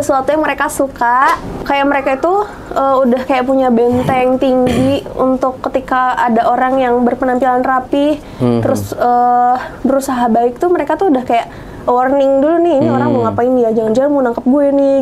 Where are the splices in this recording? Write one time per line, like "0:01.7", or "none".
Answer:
0:01.4